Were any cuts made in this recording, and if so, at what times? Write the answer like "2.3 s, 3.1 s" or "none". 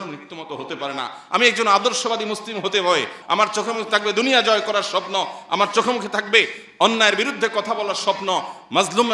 3.2 s